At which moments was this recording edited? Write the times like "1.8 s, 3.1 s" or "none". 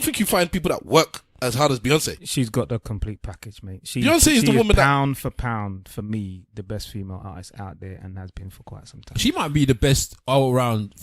2.2 s